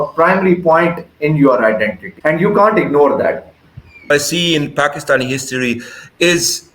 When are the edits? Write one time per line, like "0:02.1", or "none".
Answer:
0:02.0
0:04.1